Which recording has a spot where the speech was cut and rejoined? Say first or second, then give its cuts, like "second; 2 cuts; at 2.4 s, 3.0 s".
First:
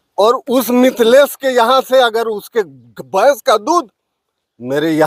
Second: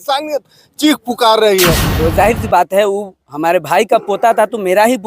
second; 1 cut; at 1.9 s